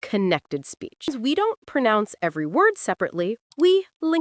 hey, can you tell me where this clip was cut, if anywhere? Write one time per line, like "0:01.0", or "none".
0:01.1